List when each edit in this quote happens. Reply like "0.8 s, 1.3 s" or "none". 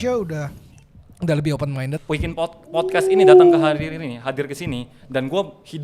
2.0 s